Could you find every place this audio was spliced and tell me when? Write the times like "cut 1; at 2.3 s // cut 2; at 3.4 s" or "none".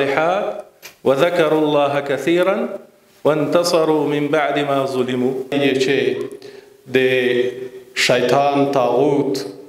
cut 1; at 5.4 s